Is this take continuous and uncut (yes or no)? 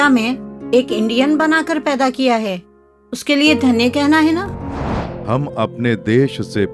no